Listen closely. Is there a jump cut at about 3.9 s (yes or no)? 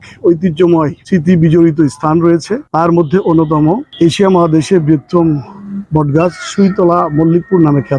yes